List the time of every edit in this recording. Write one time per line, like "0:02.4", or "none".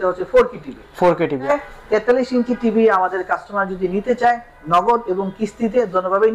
0:01.5